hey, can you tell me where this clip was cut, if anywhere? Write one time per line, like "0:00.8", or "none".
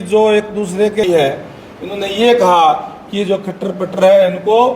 0:01.0